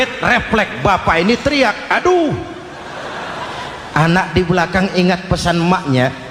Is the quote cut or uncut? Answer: uncut